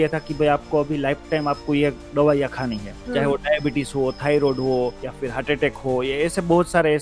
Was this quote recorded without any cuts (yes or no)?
no